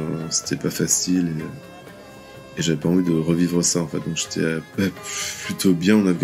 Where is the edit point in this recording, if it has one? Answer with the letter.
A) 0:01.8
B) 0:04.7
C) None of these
B